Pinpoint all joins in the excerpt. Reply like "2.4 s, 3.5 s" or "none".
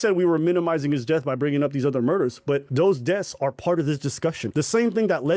2.7 s, 4.4 s